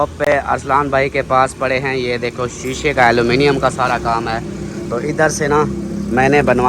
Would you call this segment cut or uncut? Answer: uncut